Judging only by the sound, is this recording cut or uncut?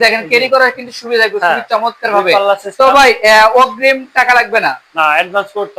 uncut